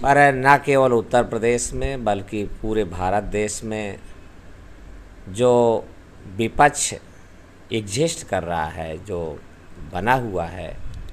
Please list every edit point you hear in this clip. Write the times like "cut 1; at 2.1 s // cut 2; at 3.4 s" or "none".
none